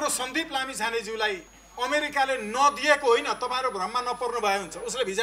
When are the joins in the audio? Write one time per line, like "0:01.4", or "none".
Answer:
0:01.6